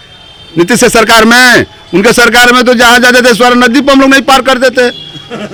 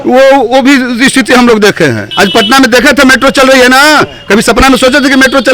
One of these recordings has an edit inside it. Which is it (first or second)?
second